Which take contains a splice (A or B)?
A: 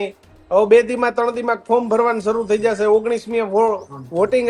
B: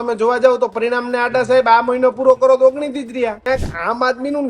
B